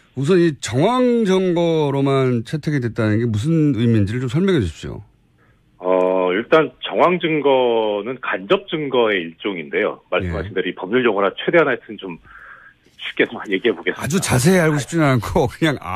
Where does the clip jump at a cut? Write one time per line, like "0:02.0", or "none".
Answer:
none